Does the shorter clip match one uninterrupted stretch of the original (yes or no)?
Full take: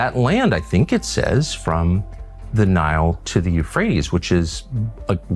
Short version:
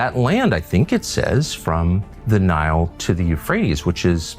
no